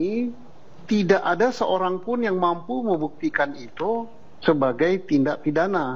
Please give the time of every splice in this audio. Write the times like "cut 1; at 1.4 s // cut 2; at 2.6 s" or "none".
none